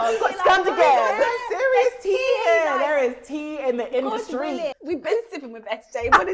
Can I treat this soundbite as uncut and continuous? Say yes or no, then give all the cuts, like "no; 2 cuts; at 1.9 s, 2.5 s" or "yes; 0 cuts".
no; 1 cut; at 4.8 s